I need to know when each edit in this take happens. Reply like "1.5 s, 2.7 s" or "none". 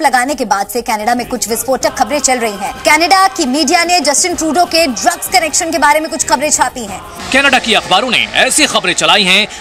none